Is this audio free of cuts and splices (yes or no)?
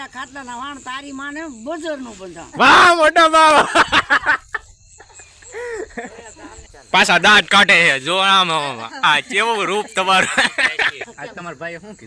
no